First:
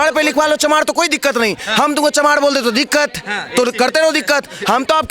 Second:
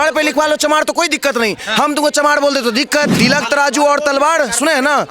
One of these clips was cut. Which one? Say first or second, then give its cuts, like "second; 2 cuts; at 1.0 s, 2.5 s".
second; 1 cut; at 3.1 s